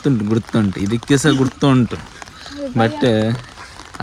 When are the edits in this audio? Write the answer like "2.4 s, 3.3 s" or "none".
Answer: none